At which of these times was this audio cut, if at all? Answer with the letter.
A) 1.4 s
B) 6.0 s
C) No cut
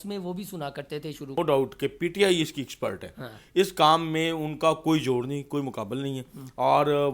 A